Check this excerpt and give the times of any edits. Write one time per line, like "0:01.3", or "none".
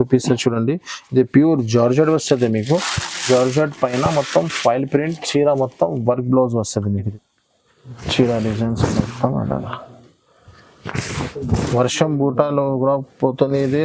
0:07.1